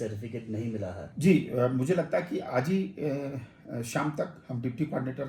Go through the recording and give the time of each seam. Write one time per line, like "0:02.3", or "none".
0:01.1